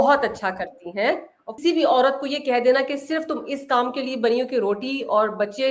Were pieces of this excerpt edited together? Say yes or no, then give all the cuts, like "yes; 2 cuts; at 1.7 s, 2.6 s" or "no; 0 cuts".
yes; 1 cut; at 1.4 s